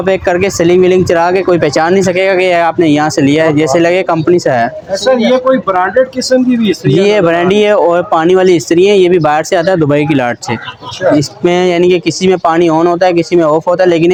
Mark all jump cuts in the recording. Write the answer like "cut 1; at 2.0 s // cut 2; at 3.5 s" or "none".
none